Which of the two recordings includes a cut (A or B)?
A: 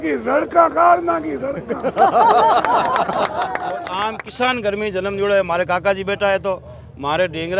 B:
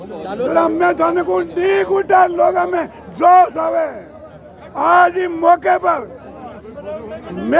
A